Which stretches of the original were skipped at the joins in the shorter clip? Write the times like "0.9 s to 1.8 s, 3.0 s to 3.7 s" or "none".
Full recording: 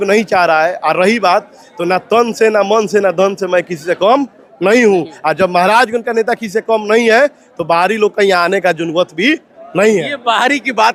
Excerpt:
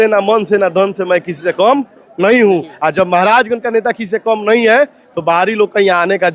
none

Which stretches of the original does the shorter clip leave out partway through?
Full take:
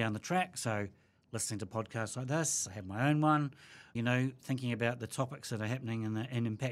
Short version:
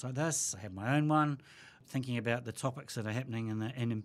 3.9 s to 4.3 s

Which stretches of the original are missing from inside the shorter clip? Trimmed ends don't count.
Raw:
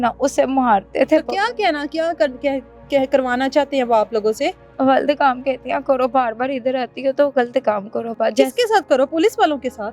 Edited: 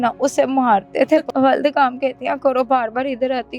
1.3 s to 4.7 s

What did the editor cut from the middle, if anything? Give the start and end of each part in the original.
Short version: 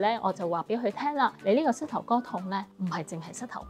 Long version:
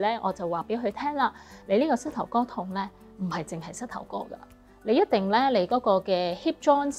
1.4 s to 1.6 s, 2.9 s to 3.1 s

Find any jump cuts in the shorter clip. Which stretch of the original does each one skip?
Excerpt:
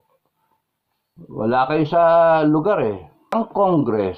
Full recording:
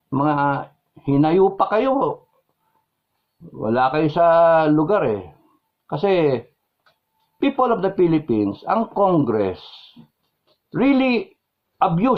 5.5 s to 8.6 s

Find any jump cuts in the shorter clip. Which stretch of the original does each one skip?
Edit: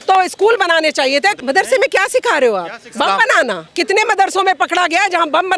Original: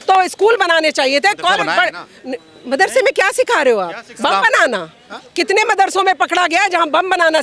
1.4 s to 2.6 s, 4.9 s to 5.2 s

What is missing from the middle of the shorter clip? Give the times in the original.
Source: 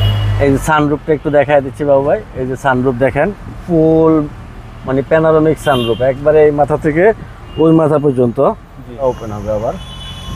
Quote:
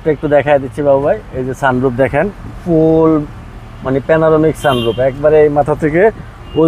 none

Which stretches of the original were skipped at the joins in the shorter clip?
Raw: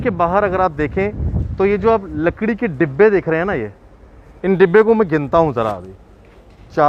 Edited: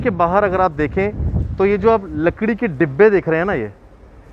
none

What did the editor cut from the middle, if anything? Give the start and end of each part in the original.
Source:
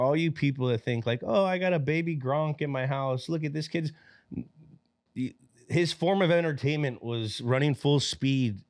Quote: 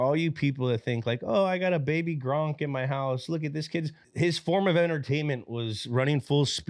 4.0 s to 5.5 s

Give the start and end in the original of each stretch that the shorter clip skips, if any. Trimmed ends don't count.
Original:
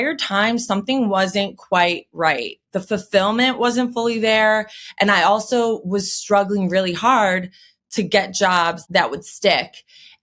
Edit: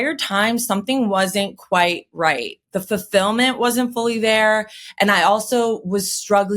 none

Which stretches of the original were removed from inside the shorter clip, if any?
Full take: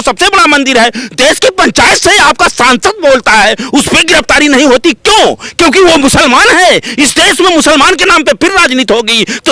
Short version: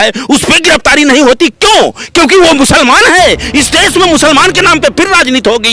none

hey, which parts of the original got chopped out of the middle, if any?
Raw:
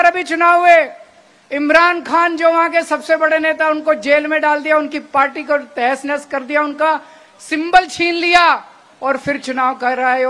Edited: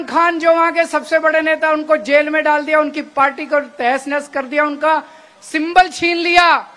none

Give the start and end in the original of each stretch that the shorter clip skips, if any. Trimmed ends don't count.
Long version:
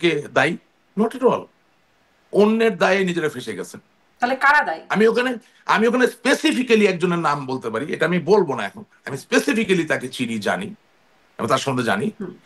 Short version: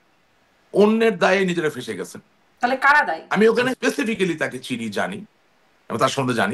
5.3 s to 9.2 s

